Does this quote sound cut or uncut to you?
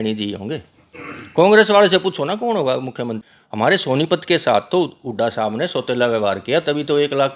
cut